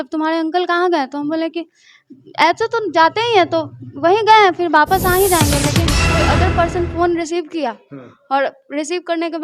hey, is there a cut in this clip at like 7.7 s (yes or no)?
no